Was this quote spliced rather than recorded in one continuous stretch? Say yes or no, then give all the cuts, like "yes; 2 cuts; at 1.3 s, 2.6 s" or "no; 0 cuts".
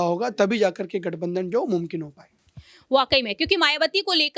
no; 0 cuts